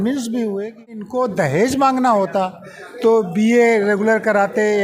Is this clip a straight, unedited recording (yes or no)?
no